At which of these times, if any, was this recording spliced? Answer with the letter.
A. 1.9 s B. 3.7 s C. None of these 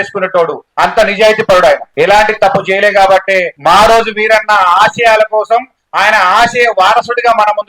A